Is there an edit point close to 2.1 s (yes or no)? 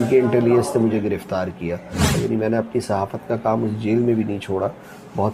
yes